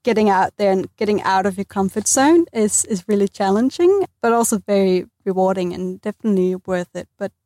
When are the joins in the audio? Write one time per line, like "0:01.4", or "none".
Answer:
0:04.1